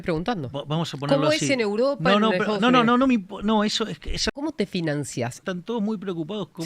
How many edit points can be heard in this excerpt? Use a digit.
2